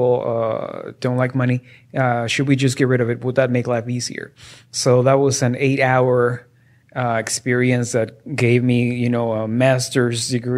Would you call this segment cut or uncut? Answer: uncut